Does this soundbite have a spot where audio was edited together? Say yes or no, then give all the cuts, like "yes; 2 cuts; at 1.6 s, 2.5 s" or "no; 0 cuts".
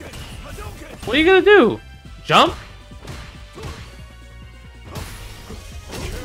no; 0 cuts